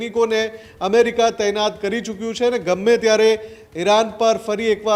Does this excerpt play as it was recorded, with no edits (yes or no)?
yes